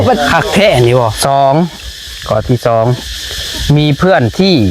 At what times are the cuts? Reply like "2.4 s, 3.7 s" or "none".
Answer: 1.2 s